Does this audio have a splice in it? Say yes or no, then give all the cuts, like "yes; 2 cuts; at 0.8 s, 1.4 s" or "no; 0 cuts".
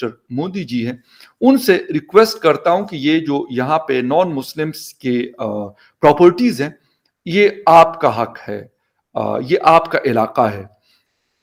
no; 0 cuts